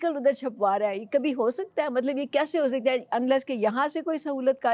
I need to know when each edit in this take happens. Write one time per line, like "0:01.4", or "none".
none